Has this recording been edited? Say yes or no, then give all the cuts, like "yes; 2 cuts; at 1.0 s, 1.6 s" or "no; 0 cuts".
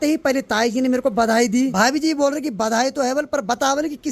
yes; 1 cut; at 1.7 s